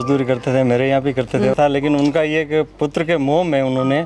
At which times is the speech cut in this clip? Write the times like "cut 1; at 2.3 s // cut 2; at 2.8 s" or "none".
cut 1; at 1.5 s